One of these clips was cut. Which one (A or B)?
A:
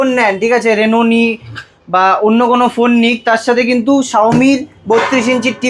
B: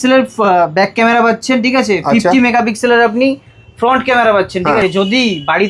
B